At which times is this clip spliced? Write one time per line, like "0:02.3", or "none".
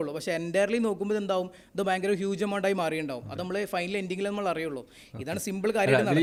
none

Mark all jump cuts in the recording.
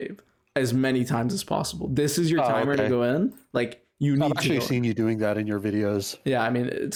none

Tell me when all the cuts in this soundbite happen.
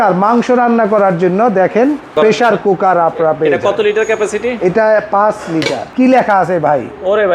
0:02.1
0:05.8

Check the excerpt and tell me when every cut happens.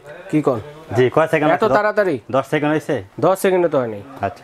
none

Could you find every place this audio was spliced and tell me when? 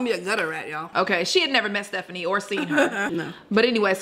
0:00.9
0:03.1

